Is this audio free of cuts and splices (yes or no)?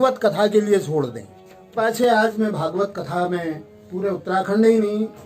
no